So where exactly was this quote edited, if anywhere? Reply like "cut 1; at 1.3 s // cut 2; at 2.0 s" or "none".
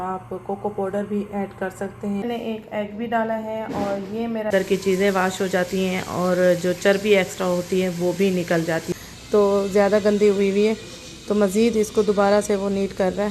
cut 1; at 2.2 s // cut 2; at 4.5 s // cut 3; at 8.9 s